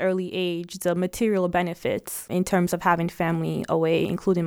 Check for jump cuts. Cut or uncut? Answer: uncut